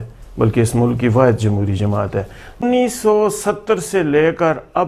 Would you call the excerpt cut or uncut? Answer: cut